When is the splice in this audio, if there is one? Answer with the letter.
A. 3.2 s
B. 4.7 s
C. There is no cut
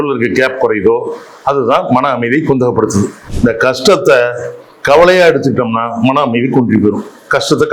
A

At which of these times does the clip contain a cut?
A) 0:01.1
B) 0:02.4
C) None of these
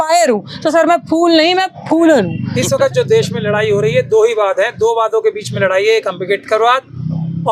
B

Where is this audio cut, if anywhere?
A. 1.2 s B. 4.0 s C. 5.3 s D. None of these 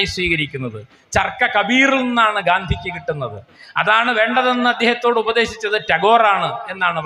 D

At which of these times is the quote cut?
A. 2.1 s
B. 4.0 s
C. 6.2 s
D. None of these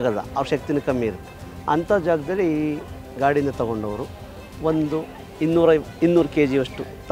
D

